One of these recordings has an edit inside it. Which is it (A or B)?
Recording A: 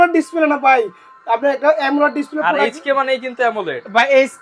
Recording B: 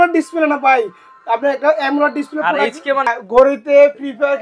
B